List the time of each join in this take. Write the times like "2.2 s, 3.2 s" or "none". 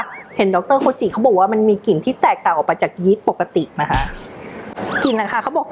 4.7 s